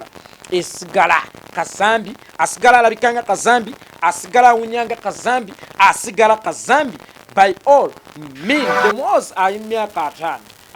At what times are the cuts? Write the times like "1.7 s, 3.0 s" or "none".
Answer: 8.8 s